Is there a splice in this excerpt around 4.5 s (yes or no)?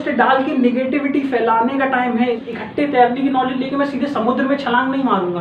no